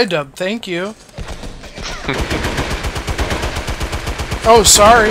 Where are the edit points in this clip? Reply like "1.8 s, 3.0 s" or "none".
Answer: none

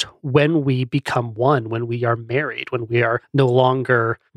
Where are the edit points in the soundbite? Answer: none

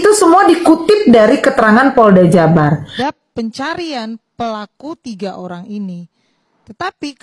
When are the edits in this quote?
2.9 s

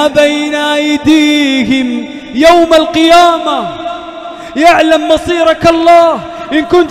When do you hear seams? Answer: none

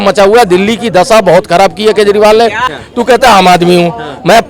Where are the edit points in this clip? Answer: 2.7 s

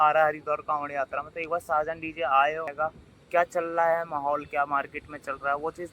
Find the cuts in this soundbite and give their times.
2.7 s

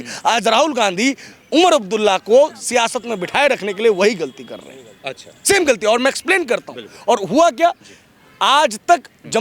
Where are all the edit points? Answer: none

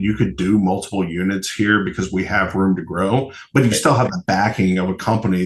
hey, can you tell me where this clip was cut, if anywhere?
none

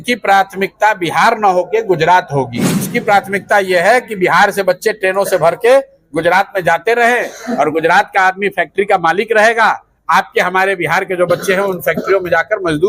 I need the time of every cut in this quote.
2.9 s

